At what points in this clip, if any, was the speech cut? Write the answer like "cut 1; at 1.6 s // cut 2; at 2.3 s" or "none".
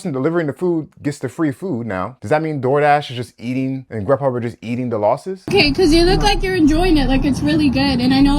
cut 1; at 2.1 s // cut 2; at 3.9 s // cut 3; at 5.5 s